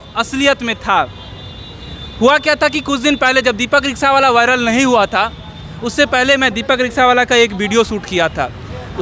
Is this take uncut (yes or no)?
yes